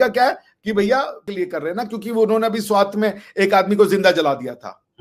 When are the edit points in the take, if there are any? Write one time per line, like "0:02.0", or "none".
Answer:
0:01.3